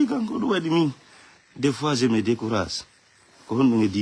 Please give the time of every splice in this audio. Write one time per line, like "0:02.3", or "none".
none